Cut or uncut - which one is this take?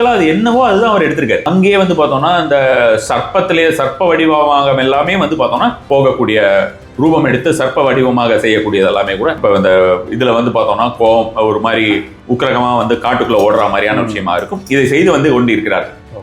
cut